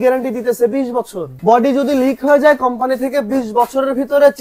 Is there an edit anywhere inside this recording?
yes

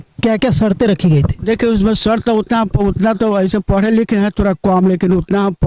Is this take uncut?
yes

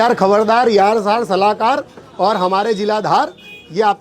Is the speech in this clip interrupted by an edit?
no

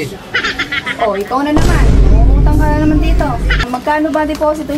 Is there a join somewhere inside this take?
yes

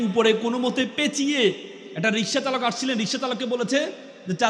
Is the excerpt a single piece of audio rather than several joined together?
yes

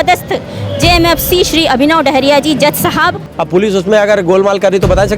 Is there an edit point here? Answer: yes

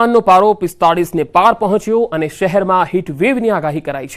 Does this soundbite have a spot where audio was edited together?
no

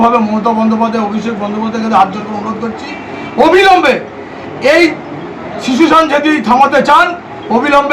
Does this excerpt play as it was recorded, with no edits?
yes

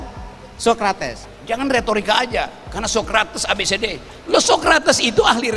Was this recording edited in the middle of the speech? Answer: yes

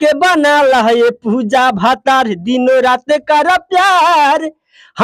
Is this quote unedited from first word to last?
yes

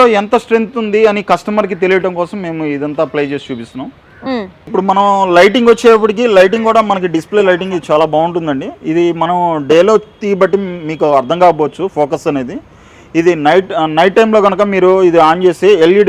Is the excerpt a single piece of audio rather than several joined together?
yes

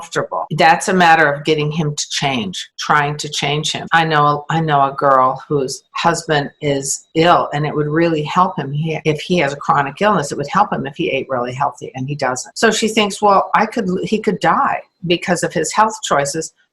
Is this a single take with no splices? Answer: no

